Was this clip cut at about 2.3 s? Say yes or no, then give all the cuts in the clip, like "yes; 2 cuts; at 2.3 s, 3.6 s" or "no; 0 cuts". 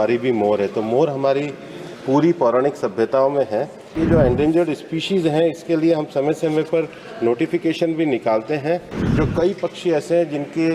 no; 2 cuts; at 3.9 s, 9.0 s